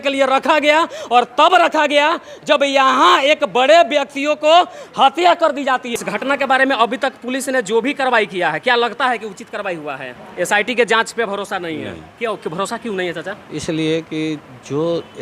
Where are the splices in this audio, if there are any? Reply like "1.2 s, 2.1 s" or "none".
5.9 s, 10.2 s